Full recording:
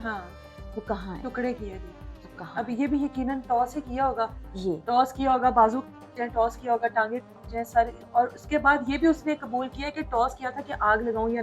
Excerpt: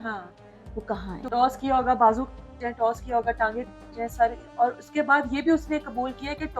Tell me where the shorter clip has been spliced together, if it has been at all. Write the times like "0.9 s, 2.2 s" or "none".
1.3 s